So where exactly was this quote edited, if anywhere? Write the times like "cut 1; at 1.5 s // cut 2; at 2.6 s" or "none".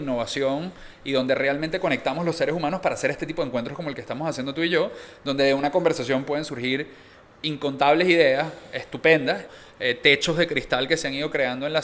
cut 1; at 9.4 s